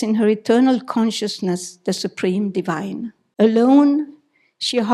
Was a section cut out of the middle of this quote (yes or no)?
yes